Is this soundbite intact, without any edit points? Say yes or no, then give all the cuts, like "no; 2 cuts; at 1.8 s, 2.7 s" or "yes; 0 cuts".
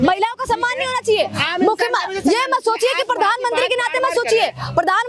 yes; 0 cuts